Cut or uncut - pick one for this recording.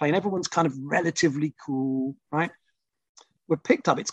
uncut